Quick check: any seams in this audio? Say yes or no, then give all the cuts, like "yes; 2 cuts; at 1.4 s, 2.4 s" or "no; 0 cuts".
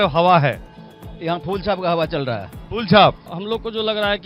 yes; 1 cut; at 3.3 s